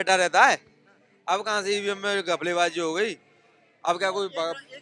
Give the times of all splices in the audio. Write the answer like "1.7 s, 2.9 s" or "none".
none